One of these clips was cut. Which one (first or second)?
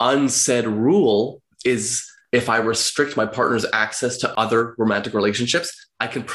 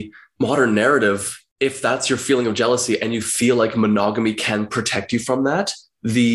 first